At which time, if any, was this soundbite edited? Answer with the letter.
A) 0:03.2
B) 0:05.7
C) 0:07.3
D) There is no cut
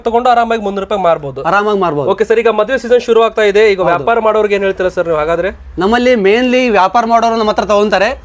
D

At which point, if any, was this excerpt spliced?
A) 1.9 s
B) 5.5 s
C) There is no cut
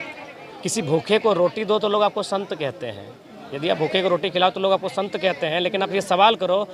C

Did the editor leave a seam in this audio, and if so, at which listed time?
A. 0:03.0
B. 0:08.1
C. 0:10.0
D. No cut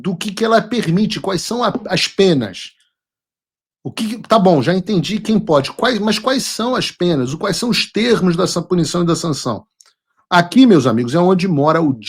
D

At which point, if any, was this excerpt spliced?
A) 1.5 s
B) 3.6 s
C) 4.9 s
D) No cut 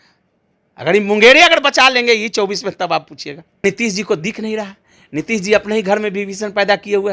B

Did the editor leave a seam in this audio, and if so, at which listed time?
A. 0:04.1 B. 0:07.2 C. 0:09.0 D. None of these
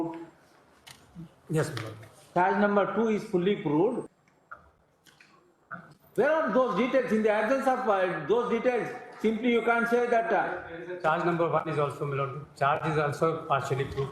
A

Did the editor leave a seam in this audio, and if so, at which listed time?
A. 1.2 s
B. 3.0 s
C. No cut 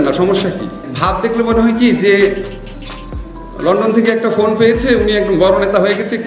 A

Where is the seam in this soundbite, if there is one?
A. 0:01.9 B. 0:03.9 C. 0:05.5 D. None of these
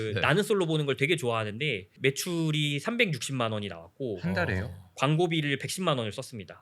A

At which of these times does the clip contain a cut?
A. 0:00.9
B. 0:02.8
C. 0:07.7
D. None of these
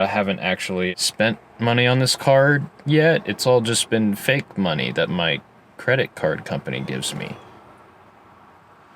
A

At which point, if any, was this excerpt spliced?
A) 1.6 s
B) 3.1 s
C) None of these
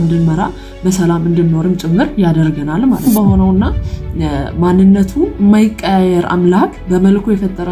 B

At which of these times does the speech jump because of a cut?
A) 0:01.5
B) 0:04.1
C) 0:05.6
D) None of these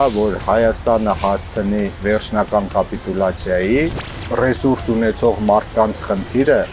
B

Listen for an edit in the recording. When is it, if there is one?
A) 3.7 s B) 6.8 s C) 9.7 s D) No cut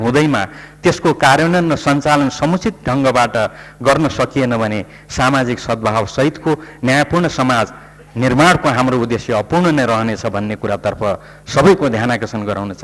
D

